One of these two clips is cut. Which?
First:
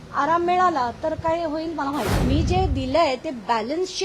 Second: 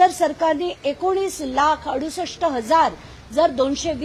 first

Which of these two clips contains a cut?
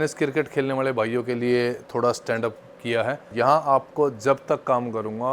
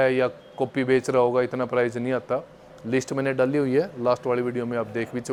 first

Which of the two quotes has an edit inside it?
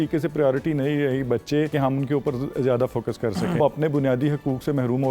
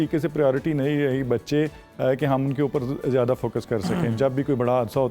first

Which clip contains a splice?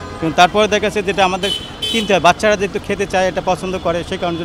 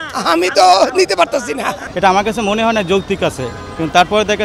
second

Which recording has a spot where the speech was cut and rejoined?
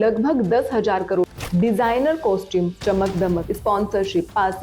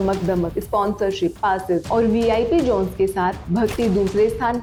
first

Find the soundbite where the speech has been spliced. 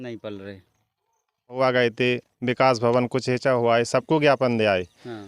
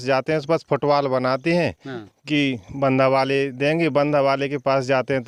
first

